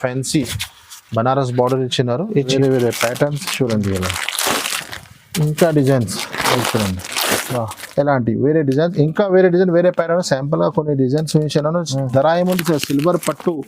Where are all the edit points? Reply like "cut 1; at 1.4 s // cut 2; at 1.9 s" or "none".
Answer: cut 1; at 2.5 s